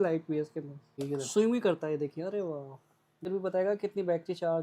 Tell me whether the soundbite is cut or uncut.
cut